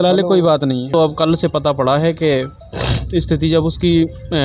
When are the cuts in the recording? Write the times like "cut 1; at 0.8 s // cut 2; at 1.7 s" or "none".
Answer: cut 1; at 0.9 s